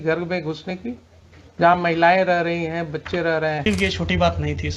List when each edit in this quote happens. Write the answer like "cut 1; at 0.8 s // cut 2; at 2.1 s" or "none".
cut 1; at 3.7 s

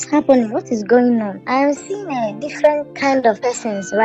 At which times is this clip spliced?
cut 1; at 1.4 s // cut 2; at 3.1 s

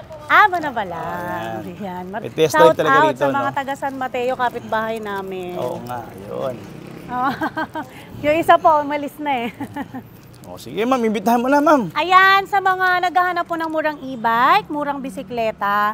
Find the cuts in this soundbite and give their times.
none

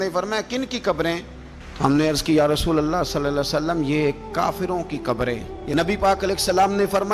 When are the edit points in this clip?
cut 1; at 5.5 s

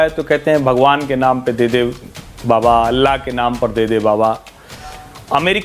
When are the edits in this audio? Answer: none

